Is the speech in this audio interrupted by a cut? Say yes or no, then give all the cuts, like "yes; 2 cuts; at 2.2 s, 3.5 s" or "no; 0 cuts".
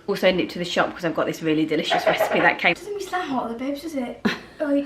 yes; 1 cut; at 2.7 s